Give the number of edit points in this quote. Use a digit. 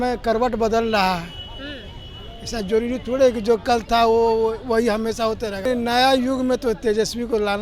1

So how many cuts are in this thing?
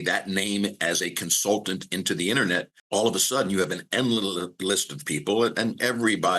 1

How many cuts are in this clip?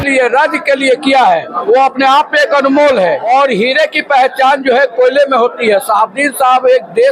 2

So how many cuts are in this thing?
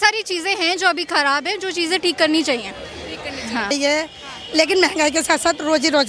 1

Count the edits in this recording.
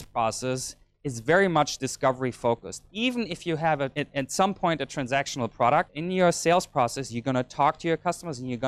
3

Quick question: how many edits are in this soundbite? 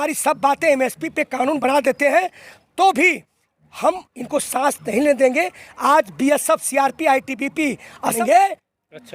1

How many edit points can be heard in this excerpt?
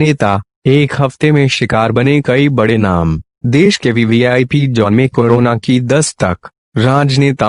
0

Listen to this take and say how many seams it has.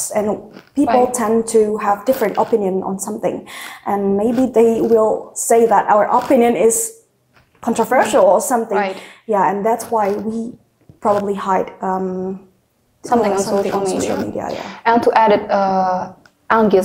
0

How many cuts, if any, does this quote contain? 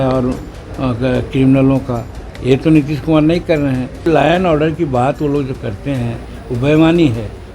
1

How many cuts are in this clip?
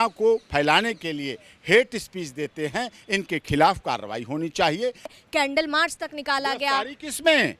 1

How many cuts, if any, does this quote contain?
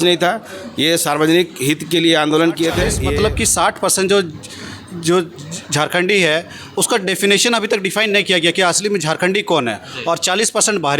1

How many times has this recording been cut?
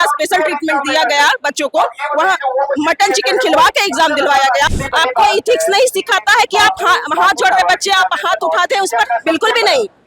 1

